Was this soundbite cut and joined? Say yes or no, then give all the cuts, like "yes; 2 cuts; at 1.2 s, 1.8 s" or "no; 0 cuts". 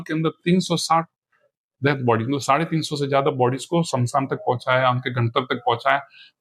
no; 0 cuts